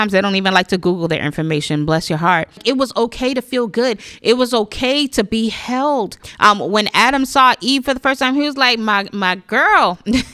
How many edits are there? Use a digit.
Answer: 2